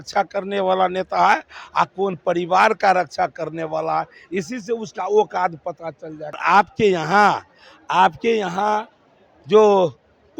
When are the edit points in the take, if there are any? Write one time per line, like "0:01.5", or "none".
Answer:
0:06.4